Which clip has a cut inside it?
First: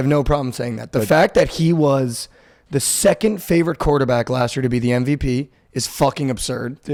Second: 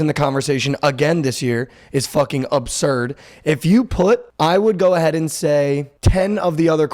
second; 2 cuts; at 4.3 s, 5.9 s

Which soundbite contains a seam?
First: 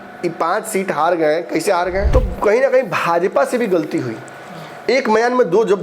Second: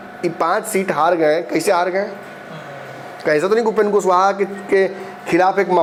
first; 1 cut; at 2.1 s

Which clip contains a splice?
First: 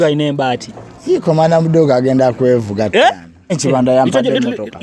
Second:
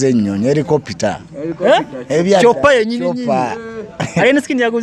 first; 1 cut; at 3.6 s

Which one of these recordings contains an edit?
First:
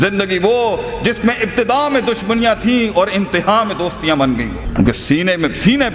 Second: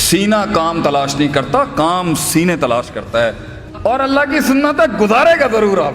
second; 1 cut; at 3.6 s

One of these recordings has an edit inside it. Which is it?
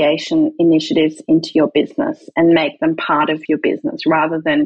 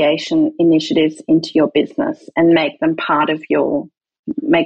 first; 1 cut; at 3.4 s

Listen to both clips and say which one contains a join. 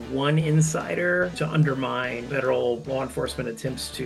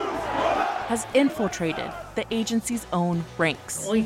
first; 1 cut; at 1.3 s

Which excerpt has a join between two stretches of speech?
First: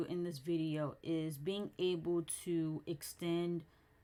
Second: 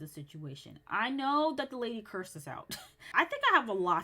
second; 1 cut; at 3.1 s

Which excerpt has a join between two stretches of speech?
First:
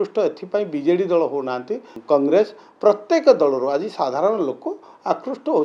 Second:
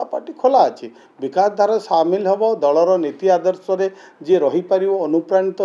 first; 1 cut; at 1.9 s

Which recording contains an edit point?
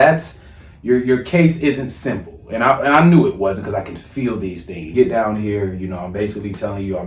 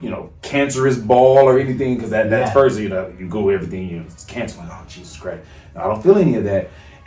first; 1 cut; at 4.9 s

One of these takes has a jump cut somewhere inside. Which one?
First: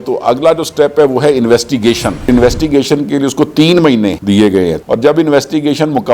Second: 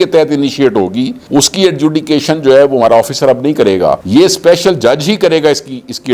first; 2 cuts; at 2.3 s, 4.8 s

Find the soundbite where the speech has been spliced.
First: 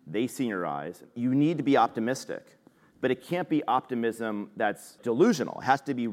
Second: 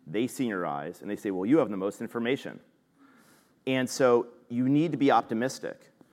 first; 2 cuts; at 1.0 s, 5.0 s

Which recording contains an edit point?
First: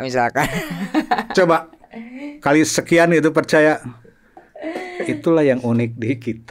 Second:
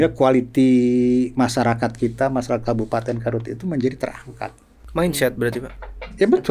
first; 1 cut; at 4.4 s

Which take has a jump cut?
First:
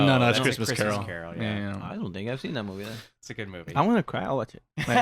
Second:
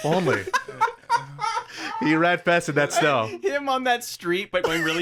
first; 1 cut; at 3.1 s

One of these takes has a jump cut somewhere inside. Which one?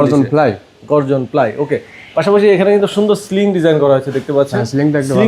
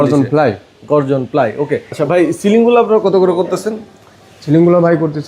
second; 1 cut; at 1.9 s

